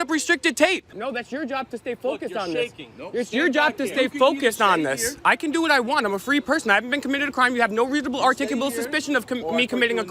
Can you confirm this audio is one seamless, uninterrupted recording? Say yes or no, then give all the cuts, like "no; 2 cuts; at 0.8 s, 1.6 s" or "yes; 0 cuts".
no; 1 cut; at 0.9 s